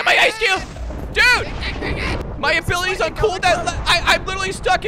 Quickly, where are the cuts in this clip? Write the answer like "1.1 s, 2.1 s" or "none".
2.2 s